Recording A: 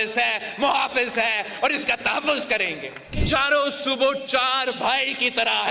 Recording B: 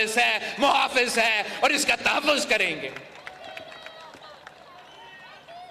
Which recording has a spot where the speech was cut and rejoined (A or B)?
A